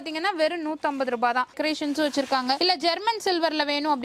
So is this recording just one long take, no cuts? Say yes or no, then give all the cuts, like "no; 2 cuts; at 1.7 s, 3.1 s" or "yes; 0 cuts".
no; 1 cut; at 1.5 s